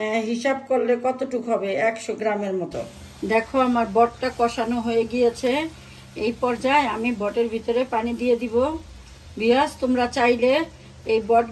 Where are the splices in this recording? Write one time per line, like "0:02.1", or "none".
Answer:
0:03.0

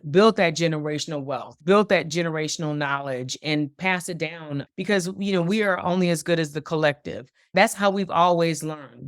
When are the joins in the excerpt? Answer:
0:01.5
0:07.3

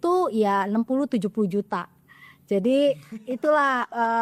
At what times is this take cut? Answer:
none

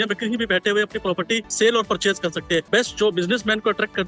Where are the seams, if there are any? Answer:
0:01.5
0:02.7

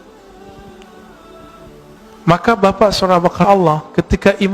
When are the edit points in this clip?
0:01.6

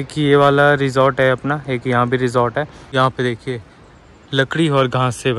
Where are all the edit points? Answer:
0:02.8

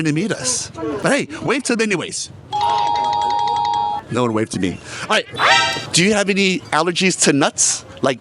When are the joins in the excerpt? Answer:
0:05.5

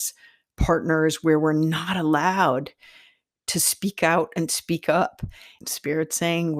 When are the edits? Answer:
0:03.5
0:05.5

